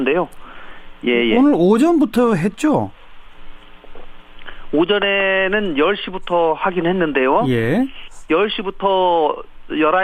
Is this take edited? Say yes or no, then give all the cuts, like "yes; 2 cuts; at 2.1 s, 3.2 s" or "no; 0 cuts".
no; 0 cuts